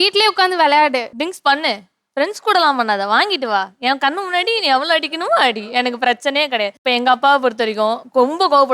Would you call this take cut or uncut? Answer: cut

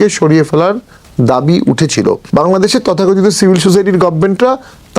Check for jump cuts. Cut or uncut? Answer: cut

